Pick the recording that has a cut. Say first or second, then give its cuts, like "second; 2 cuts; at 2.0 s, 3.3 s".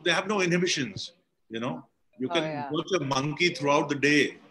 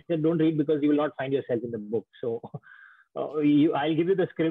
first; 1 cut; at 2.0 s